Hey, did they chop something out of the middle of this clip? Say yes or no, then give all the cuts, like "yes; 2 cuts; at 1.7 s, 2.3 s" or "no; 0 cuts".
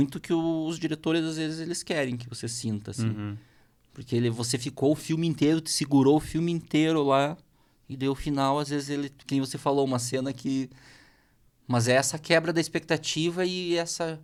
no; 0 cuts